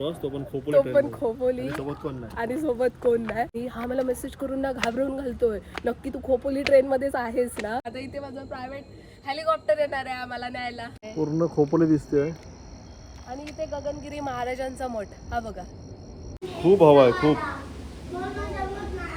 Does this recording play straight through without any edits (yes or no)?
no